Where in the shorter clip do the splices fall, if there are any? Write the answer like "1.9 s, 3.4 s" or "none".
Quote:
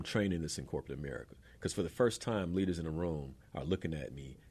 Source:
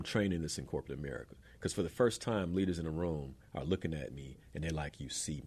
none